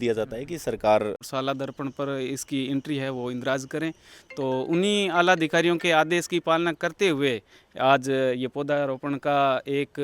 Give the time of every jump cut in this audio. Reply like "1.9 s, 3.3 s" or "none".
1.2 s